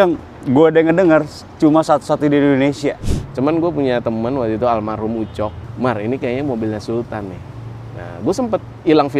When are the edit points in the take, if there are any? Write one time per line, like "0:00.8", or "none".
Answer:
0:03.1
0:05.6